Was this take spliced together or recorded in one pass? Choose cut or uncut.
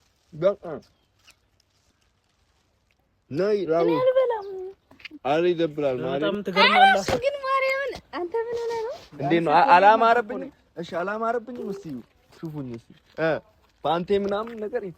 cut